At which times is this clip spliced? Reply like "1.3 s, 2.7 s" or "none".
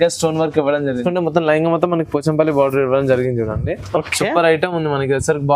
1.0 s